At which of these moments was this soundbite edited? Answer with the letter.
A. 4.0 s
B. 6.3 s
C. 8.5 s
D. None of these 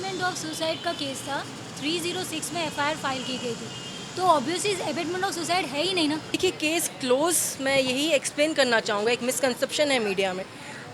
B